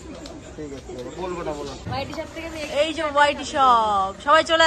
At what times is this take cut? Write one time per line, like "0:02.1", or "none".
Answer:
0:01.9